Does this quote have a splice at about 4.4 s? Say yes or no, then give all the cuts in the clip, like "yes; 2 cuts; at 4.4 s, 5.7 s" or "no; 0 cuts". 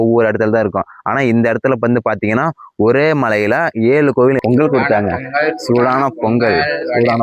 yes; 1 cut; at 4.4 s